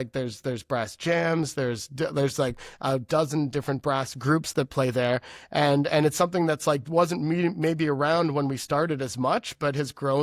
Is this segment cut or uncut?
uncut